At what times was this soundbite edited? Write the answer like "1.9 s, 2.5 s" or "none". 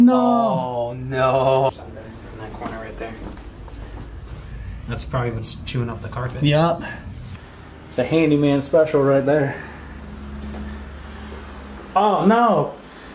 none

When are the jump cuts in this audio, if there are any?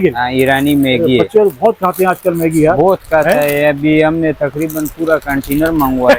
none

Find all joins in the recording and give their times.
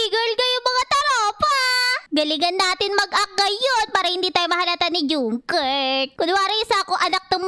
2.0 s, 6.1 s

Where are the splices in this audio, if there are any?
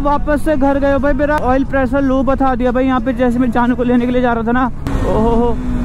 1.4 s, 4.9 s

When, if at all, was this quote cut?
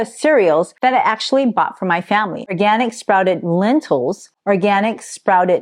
2.4 s

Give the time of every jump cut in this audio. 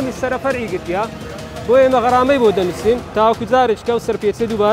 none

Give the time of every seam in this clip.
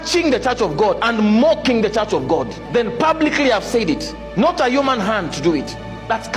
none

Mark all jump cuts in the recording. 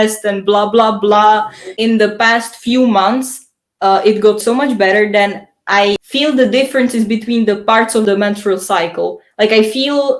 1.7 s, 4.4 s, 6.0 s, 8.0 s

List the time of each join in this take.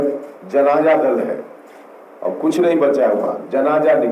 none

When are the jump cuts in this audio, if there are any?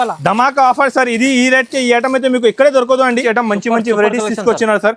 3.1 s

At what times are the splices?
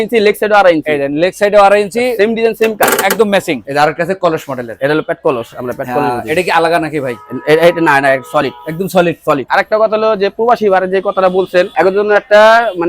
3.6 s, 9.5 s, 11.7 s

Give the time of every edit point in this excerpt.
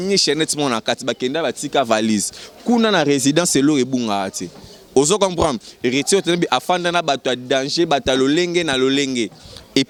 none

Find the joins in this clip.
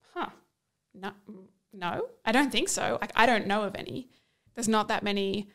4.4 s

